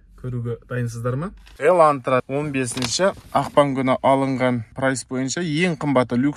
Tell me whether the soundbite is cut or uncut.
cut